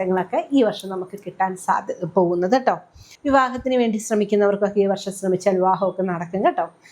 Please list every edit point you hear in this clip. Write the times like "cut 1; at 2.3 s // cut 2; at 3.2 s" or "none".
cut 1; at 3.0 s